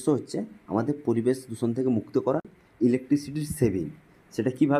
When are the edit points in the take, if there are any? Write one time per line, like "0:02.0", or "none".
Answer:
0:02.6